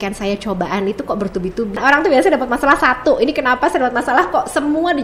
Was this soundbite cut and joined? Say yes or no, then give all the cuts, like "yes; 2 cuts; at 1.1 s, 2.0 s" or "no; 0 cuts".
yes; 1 cut; at 1.8 s